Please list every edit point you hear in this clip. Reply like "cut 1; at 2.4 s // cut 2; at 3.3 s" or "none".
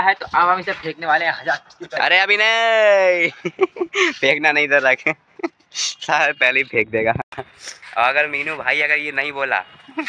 none